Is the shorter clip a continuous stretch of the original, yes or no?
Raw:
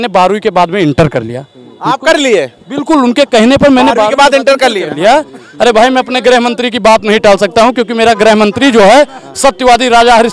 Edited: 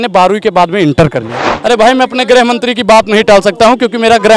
no